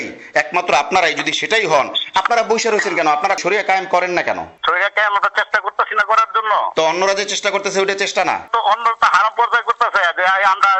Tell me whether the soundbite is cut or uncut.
uncut